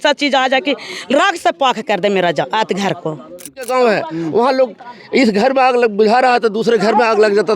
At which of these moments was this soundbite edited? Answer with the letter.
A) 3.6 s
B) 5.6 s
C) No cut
A